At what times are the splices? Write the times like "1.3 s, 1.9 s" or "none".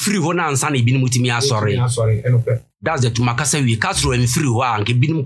2.7 s